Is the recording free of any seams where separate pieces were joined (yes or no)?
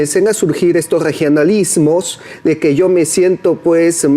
yes